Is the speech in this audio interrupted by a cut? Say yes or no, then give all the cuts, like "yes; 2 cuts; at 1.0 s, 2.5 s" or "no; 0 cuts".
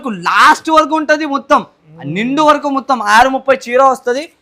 no; 0 cuts